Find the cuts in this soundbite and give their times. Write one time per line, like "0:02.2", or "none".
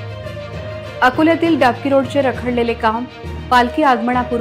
0:00.9